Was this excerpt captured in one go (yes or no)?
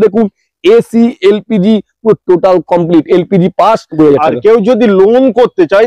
no